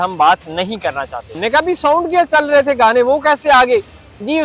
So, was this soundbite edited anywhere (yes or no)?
yes